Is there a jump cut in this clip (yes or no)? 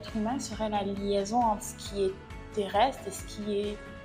no